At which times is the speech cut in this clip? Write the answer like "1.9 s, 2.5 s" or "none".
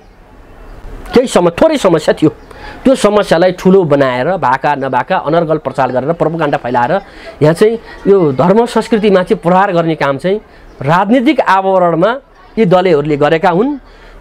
none